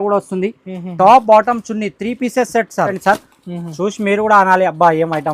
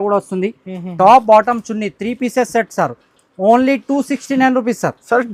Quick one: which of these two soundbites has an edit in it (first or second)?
first